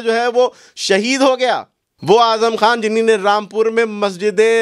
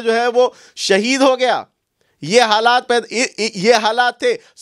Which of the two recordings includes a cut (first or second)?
first